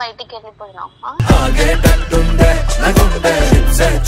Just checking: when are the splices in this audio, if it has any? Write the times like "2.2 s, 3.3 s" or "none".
1.2 s